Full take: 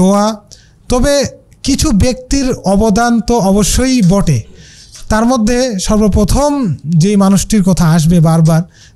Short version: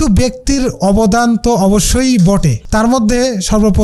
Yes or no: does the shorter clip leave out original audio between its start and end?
yes